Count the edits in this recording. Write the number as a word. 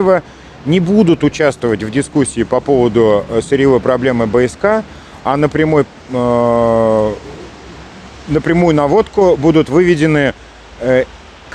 zero